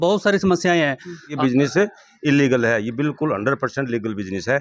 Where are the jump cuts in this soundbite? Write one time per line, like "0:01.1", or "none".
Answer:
0:01.3